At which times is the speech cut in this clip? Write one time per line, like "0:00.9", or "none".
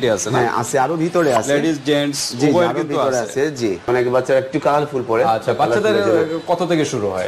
0:03.9

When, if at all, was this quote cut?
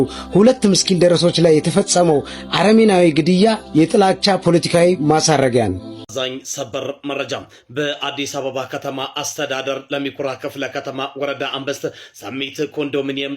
0:06.0

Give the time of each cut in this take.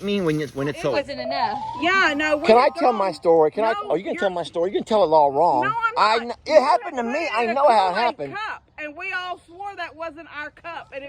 0:00.9

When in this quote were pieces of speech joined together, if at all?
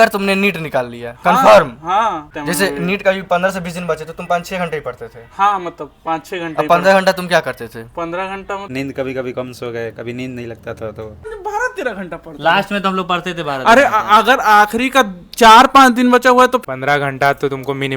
0:02.2
0:08.6
0:11.3
0:16.6

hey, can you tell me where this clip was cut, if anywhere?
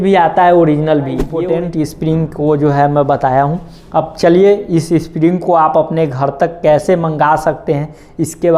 0:01.3

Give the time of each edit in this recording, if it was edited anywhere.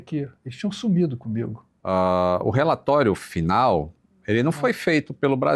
0:01.7

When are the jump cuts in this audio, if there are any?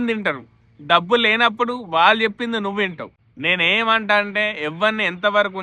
none

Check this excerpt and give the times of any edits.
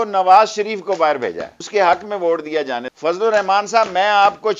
0:01.5
0:02.8

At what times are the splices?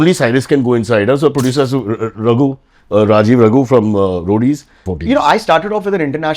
0:04.9

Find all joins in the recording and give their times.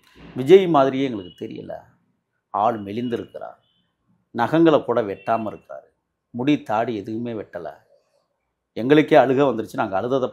none

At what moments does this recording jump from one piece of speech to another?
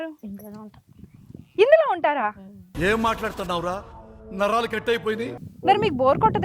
0:05.4

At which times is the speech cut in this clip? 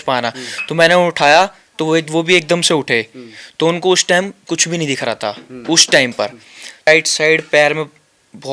0:06.9

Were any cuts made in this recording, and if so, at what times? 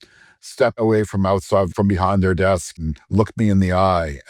0:00.8
0:01.7
0:02.9

